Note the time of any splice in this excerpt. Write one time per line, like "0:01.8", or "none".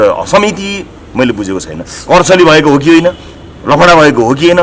none